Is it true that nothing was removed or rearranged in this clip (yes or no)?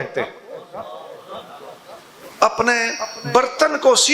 no